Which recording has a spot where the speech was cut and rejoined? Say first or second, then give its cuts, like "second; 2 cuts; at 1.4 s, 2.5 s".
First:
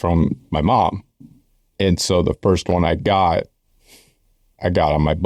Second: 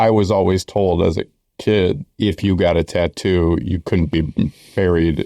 second; 1 cut; at 2.1 s